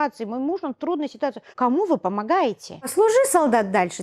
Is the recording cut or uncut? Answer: cut